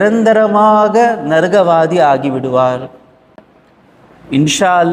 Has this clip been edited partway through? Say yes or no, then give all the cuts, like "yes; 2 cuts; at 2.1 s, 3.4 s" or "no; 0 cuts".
no; 0 cuts